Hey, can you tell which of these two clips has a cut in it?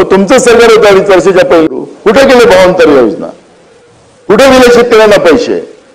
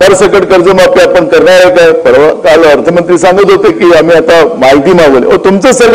first; 1 cut; at 1.7 s

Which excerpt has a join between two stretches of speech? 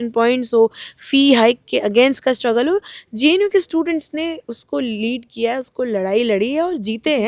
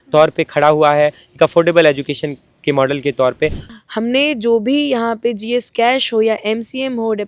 second; 1 cut; at 3.6 s

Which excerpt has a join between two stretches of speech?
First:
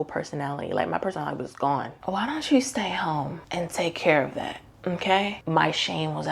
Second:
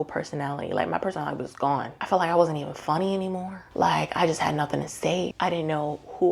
first; 2 cuts; at 1.9 s, 5.4 s

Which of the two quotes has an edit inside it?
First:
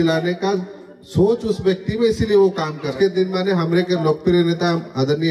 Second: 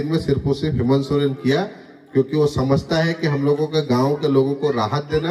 first; 1 cut; at 2.9 s

